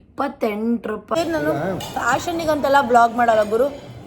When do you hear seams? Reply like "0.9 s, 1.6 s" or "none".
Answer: 1.2 s